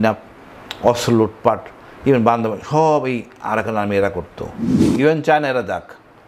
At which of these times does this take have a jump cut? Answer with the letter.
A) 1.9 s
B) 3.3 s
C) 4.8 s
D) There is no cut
C